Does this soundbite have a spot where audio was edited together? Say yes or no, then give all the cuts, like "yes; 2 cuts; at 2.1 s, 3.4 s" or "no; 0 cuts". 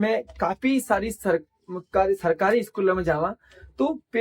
no; 0 cuts